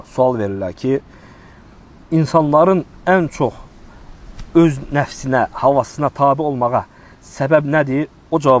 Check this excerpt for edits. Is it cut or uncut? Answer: uncut